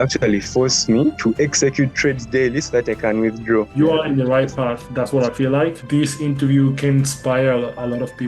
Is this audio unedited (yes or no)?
no